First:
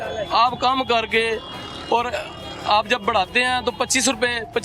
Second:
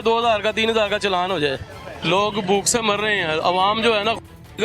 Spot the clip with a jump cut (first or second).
second